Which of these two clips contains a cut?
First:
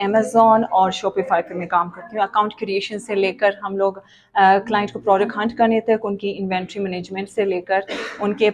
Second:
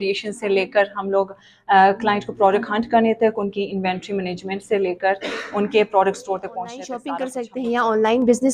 second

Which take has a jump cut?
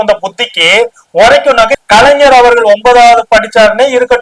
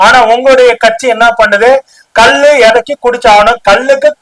first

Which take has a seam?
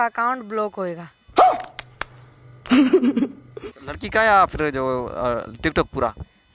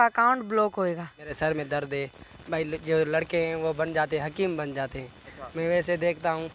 second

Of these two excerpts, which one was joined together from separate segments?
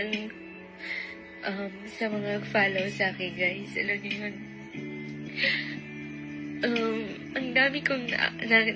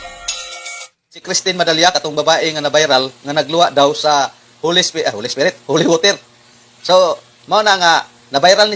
second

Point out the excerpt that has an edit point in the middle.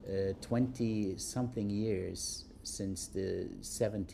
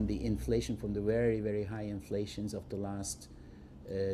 first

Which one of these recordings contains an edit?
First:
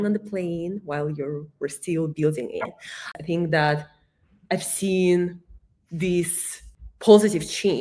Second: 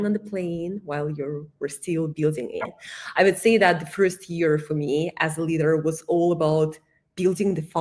first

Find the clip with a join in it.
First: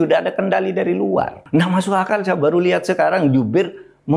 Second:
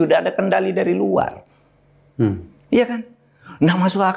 first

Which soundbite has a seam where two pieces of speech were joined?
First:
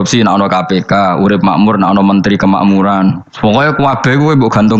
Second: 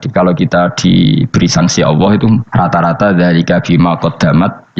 second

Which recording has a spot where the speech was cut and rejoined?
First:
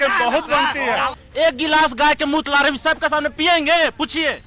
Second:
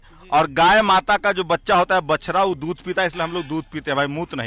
first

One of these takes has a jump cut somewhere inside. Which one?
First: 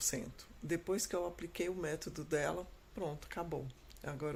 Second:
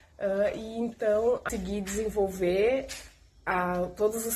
second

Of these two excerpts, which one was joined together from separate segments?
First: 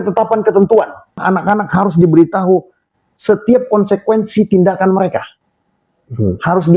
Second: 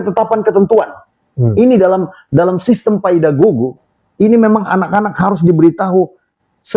first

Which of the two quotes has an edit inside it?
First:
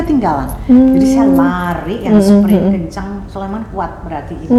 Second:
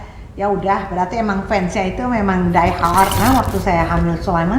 second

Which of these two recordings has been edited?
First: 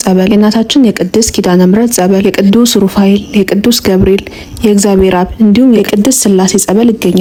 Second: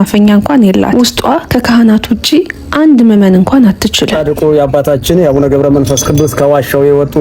second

